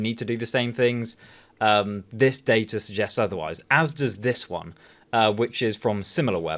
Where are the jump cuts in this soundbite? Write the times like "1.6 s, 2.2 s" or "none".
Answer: none

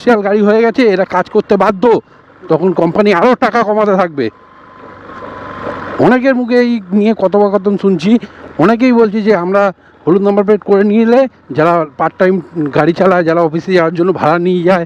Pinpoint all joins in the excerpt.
none

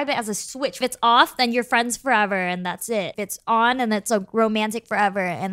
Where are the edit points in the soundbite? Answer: 0.8 s, 3.1 s

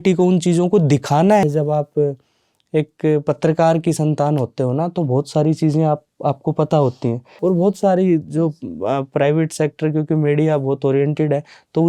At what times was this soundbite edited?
1.5 s, 7.3 s

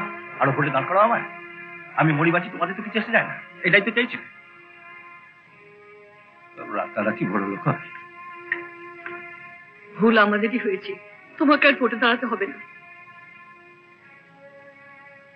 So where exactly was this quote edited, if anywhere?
none

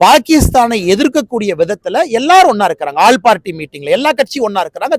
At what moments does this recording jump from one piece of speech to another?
none

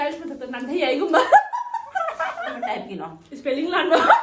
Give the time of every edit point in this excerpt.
2.6 s

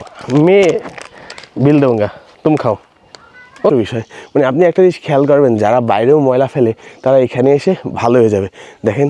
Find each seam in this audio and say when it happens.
3.7 s

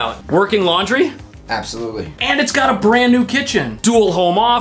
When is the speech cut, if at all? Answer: none

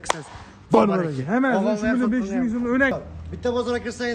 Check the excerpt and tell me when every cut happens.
3.0 s

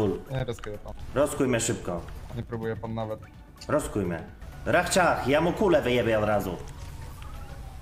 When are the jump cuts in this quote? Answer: none

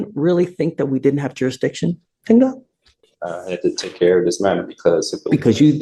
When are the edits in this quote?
none

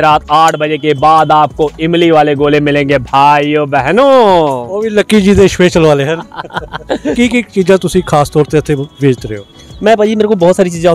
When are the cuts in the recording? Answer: 7.1 s

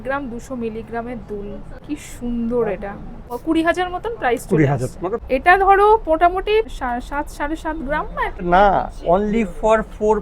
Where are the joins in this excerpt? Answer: 1.7 s, 3.3 s, 5.1 s, 6.7 s, 8.3 s

